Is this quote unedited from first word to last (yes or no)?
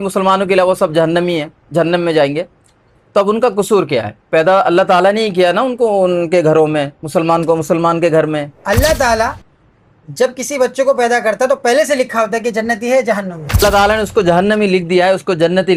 no